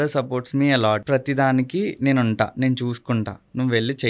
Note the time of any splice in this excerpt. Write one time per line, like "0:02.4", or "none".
0:01.0